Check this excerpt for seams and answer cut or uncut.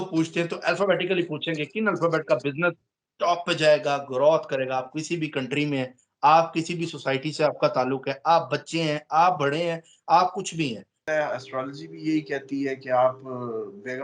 cut